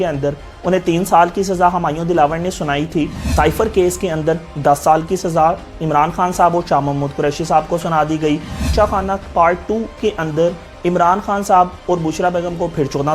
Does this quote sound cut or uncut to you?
cut